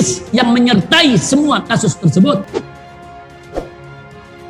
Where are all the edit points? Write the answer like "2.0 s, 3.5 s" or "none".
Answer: none